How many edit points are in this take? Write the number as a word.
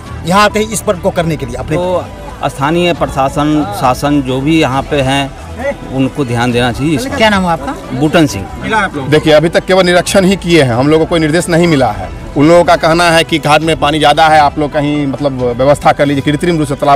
two